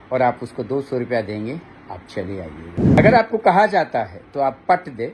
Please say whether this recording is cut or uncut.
cut